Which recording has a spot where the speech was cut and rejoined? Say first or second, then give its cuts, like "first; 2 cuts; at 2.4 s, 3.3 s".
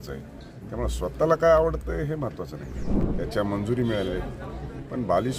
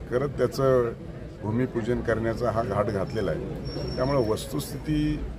first; 1 cut; at 3.0 s